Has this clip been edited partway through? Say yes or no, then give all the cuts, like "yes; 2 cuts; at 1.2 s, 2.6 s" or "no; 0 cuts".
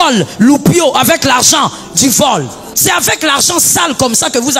yes; 1 cut; at 2.6 s